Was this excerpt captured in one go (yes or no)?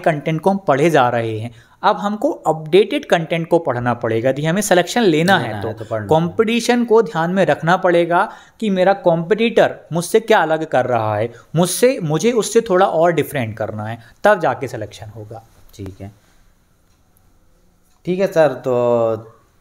yes